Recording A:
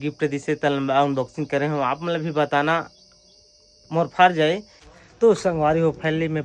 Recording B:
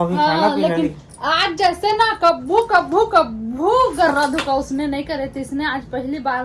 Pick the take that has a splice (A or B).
A